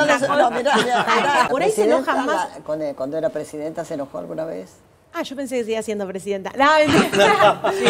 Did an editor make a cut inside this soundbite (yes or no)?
yes